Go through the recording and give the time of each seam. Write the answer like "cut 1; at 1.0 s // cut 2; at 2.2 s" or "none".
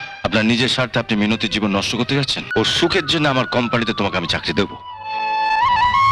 cut 1; at 2.4 s